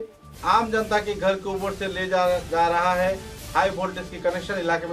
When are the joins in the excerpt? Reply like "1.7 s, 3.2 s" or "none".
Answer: none